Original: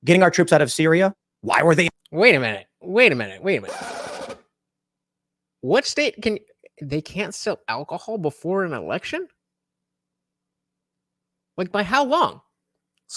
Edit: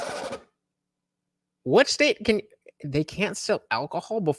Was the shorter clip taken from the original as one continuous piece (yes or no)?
yes